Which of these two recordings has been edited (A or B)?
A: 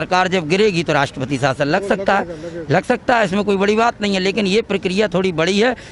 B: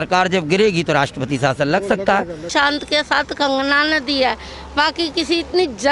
B